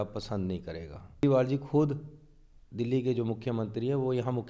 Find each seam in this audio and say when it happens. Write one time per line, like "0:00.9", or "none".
0:01.2